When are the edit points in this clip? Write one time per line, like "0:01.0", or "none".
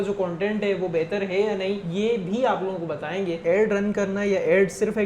0:01.8
0:03.4